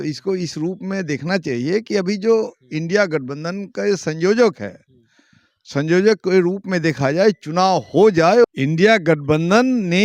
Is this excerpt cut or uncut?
cut